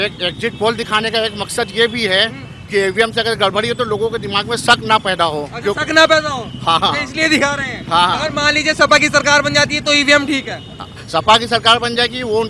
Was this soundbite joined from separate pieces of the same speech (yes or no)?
no